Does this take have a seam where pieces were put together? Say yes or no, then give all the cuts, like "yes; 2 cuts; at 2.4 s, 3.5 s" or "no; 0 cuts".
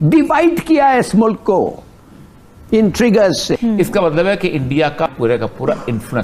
yes; 2 cuts; at 3.6 s, 5.1 s